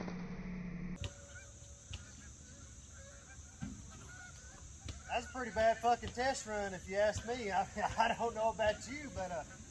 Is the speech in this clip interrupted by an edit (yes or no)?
yes